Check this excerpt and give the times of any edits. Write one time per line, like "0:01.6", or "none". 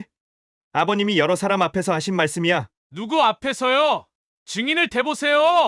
none